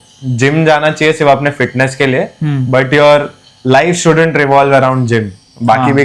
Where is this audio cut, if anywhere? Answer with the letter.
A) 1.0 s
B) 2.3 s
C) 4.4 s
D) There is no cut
D